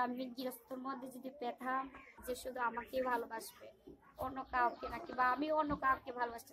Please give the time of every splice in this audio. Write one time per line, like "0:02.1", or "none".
0:02.1